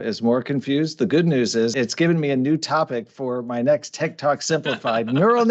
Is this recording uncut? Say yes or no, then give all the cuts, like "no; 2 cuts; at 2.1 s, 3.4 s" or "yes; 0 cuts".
no; 1 cut; at 1.7 s